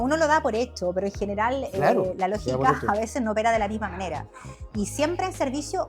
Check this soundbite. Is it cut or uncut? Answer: uncut